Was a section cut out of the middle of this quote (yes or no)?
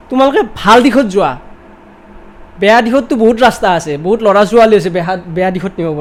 no